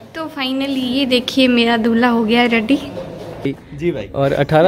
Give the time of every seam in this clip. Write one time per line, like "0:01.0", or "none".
0:03.5